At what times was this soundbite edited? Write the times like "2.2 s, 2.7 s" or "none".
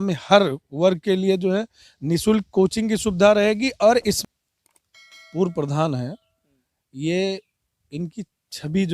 4.2 s